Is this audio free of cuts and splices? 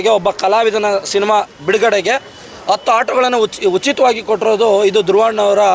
yes; 0 cuts

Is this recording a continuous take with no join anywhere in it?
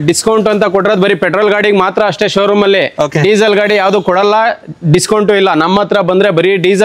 yes; 0 cuts

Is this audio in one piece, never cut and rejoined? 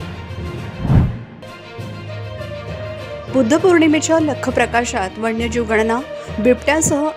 no; 1 cut; at 1.3 s

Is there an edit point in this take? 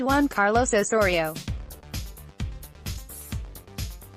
yes; 2 cuts; at 1.3 s, 3.0 s

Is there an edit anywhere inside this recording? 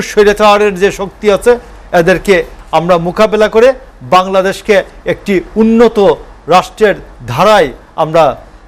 no; 0 cuts

